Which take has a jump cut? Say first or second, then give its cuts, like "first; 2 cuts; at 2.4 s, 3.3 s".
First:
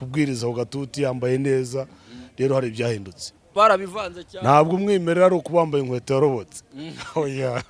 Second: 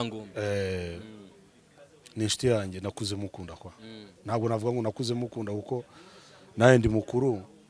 first; 1 cut; at 3.5 s